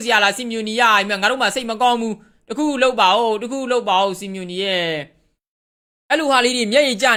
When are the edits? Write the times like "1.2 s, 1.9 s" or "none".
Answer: none